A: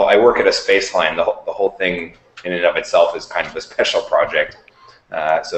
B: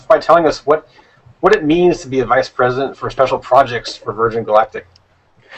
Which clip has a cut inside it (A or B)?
B